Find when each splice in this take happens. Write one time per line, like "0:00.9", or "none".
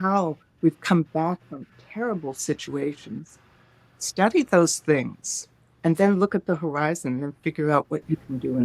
none